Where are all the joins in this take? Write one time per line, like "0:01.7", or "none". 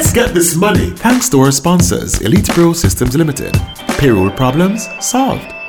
0:00.9